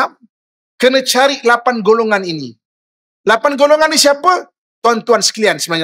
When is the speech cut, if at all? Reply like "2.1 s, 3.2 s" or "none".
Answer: none

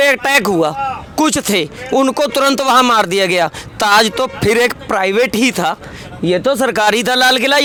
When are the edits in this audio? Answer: none

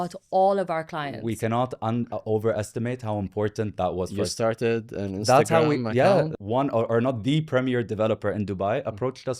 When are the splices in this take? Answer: none

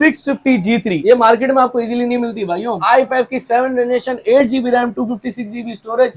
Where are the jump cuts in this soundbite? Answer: 2.8 s

